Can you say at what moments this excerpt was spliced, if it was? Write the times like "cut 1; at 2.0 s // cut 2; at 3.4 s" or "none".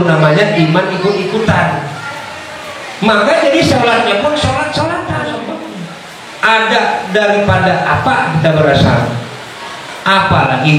cut 1; at 5.5 s // cut 2; at 6.6 s

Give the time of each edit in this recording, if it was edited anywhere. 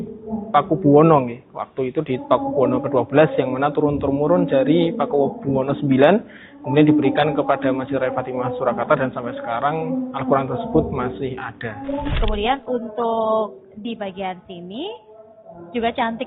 cut 1; at 12.1 s

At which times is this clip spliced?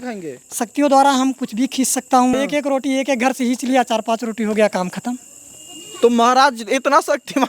cut 1; at 2.3 s

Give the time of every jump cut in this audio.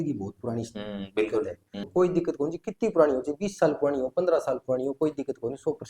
cut 1; at 1.9 s

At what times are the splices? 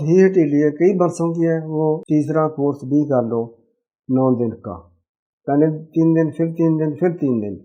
cut 1; at 2.0 s

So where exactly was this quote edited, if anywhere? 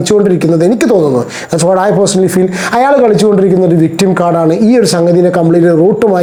none

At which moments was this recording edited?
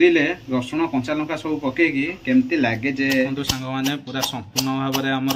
cut 1; at 3.4 s

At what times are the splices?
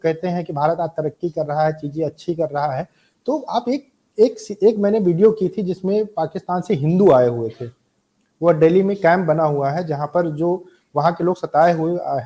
none

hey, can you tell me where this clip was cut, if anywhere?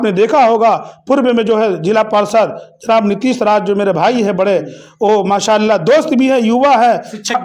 none

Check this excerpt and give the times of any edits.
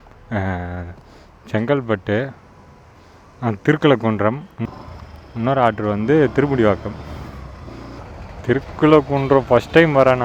cut 1; at 4.5 s // cut 2; at 8.1 s

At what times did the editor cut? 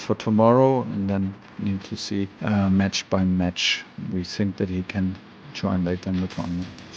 cut 1; at 2.3 s

